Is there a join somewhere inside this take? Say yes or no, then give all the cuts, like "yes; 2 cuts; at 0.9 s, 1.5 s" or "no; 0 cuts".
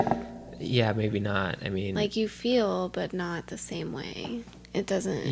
no; 0 cuts